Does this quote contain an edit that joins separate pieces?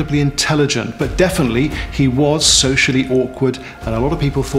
no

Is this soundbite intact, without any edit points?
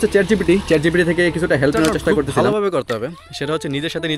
no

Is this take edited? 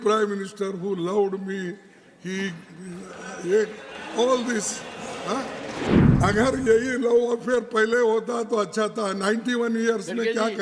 yes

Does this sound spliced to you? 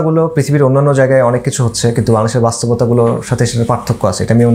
no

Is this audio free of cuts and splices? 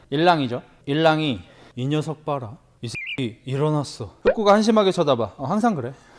no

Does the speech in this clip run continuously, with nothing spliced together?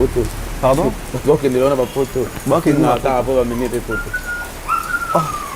yes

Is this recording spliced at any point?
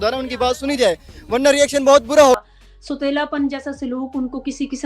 yes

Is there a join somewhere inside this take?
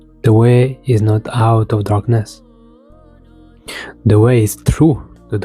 yes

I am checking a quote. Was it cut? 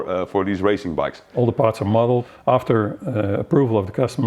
yes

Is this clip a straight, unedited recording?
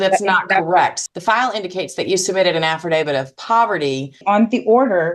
no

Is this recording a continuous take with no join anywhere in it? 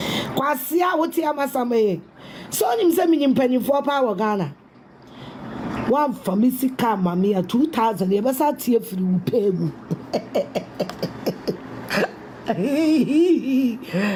yes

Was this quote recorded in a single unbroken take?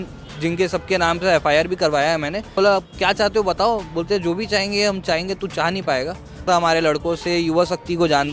no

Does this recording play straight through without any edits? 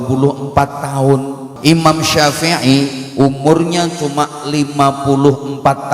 no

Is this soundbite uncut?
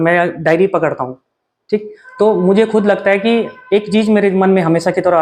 yes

